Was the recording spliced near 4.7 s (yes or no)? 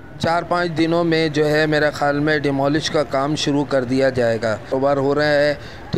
yes